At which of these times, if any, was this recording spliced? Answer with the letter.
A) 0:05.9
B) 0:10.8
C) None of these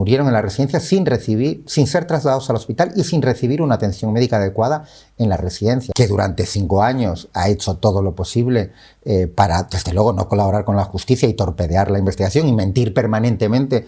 A